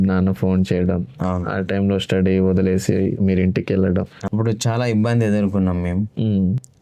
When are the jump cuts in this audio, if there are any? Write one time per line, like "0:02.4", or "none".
0:04.2